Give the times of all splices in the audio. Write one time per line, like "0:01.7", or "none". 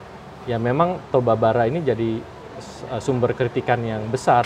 none